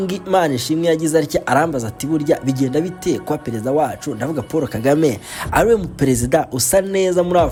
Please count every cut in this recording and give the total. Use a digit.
0